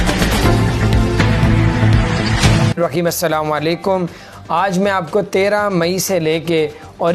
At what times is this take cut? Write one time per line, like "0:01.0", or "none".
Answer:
0:02.8